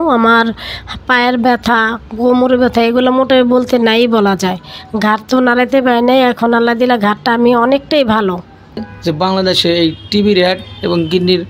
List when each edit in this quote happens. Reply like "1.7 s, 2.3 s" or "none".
8.9 s